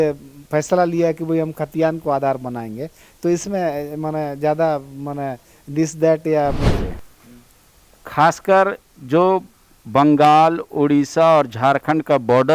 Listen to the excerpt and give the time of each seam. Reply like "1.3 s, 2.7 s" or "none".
6.7 s